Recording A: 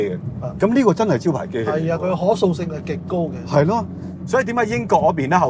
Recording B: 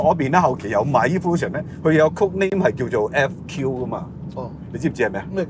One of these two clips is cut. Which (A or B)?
A